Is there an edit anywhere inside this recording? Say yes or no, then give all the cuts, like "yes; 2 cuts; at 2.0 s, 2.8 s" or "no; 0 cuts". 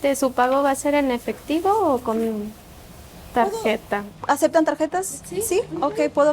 yes; 1 cut; at 4.1 s